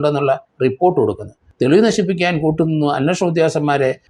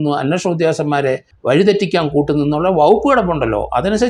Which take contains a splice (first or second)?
first